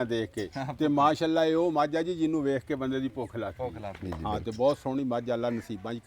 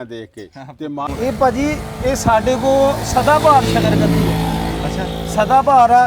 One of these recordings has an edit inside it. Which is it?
second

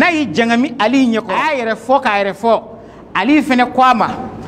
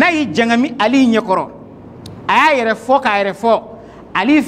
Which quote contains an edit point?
first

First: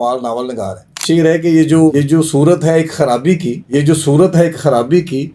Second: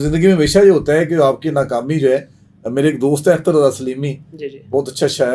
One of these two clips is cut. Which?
first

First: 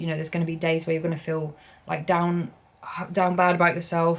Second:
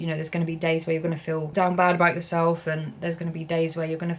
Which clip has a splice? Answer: second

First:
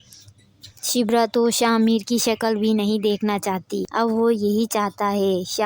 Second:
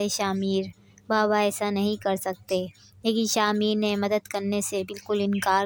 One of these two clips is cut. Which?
first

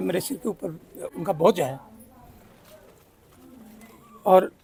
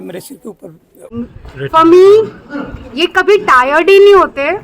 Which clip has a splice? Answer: second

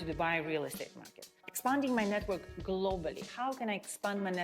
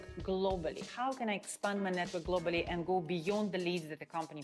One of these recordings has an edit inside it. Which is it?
first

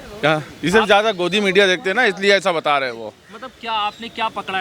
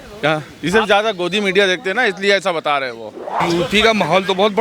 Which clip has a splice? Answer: second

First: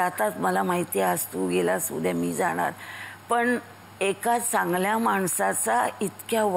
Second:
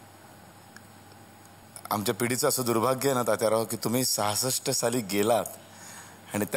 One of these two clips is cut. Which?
second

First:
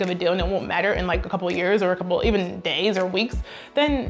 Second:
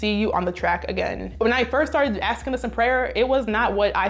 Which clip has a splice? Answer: second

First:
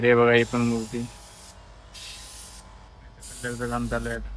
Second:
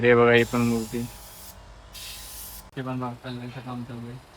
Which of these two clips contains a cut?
second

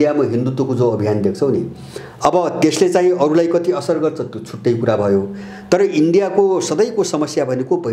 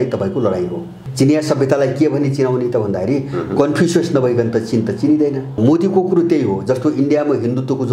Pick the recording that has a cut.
second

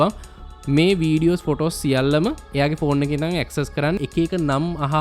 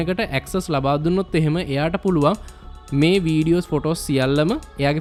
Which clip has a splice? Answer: first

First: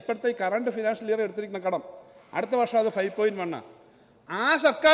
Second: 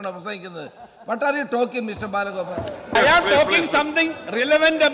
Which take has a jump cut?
second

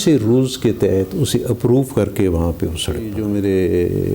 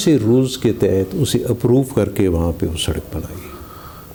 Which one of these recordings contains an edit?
first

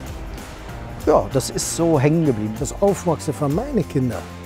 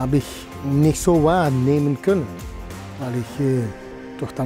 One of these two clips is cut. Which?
first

